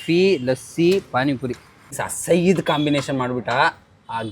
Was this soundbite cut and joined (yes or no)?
yes